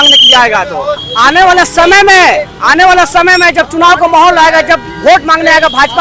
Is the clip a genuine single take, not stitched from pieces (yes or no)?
yes